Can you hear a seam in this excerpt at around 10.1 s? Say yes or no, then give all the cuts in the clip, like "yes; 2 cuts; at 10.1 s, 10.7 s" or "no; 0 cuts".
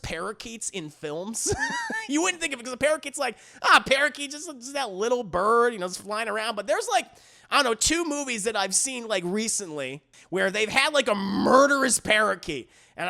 yes; 1 cut; at 10.1 s